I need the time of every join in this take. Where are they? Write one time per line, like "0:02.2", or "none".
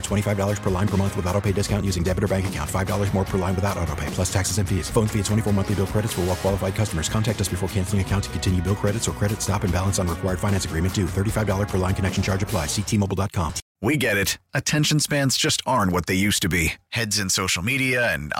0:13.6